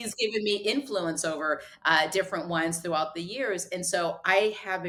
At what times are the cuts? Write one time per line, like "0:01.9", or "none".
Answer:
none